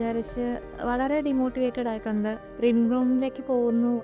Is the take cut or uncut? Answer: cut